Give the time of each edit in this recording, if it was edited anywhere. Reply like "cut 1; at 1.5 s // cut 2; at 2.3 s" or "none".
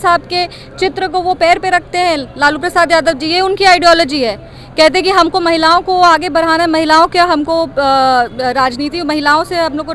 none